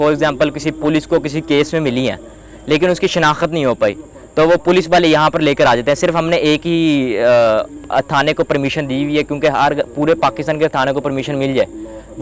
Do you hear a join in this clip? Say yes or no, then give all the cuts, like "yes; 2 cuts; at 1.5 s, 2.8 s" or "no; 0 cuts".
no; 0 cuts